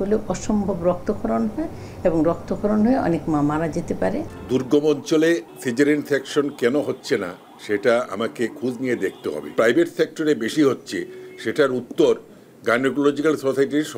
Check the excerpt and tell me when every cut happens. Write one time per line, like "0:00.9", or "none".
0:04.3
0:09.5